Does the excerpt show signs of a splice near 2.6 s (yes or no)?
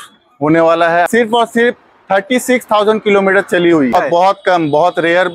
no